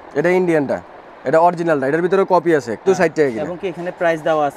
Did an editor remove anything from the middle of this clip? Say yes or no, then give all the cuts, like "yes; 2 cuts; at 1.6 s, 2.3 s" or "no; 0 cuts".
yes; 1 cut; at 2.9 s